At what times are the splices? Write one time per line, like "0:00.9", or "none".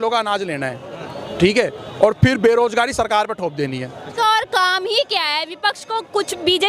0:04.1